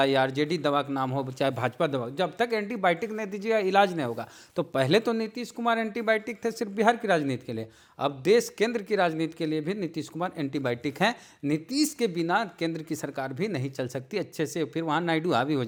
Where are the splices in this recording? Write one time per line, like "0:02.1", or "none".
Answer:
none